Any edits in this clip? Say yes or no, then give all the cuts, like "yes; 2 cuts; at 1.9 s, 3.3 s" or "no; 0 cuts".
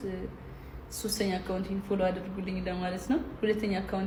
no; 0 cuts